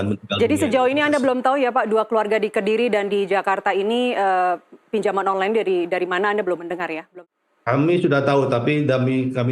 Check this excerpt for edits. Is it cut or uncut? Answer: cut